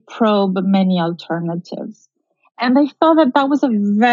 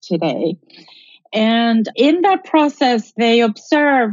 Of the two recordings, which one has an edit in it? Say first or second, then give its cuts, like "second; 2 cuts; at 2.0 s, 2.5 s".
second; 2 cuts; at 1.9 s, 3.1 s